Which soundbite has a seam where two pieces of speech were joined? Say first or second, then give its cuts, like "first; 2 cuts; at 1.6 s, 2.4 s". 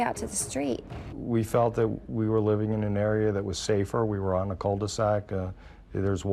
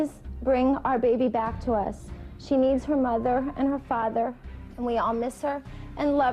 first; 1 cut; at 1.1 s